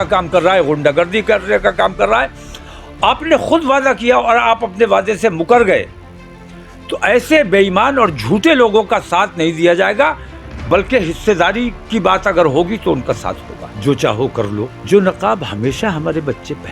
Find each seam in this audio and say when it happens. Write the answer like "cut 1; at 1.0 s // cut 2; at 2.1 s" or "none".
none